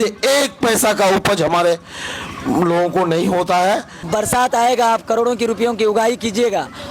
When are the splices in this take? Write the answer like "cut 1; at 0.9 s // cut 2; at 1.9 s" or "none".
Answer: cut 1; at 4.1 s